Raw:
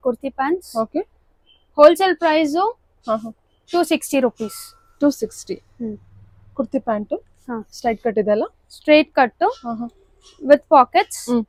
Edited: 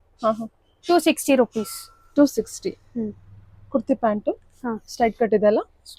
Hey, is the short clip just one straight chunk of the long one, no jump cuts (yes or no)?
yes